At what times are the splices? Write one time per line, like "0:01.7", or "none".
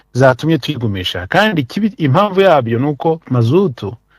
0:03.2